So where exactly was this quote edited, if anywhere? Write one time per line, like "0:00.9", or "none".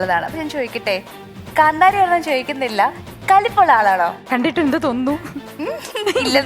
0:04.3
0:05.5